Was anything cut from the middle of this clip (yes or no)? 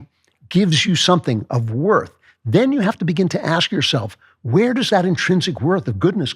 no